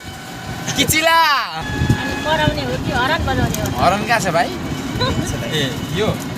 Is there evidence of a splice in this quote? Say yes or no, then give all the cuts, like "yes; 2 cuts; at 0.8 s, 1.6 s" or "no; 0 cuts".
yes; 1 cut; at 1.7 s